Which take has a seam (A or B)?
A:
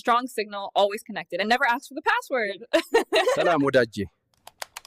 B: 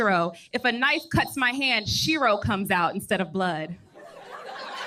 A